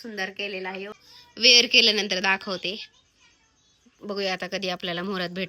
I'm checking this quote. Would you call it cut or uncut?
cut